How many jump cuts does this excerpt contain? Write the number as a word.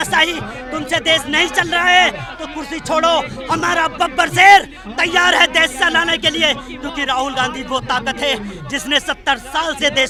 zero